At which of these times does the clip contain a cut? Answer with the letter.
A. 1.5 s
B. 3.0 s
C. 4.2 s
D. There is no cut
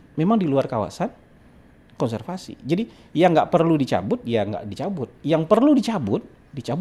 D